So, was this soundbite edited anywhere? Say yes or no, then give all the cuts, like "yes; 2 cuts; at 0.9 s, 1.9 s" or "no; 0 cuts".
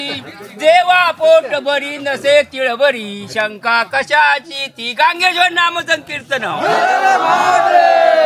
no; 0 cuts